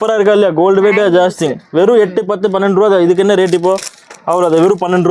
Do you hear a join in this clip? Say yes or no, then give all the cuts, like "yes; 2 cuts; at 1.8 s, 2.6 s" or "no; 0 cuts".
no; 0 cuts